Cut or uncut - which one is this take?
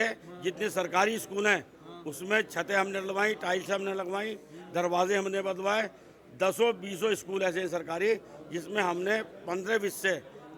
uncut